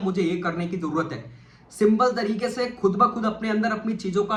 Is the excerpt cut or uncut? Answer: uncut